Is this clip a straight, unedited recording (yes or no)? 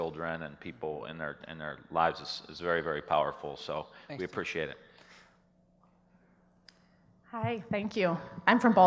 no